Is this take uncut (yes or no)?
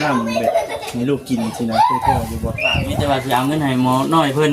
no